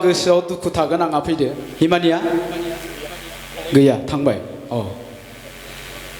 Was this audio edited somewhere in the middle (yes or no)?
yes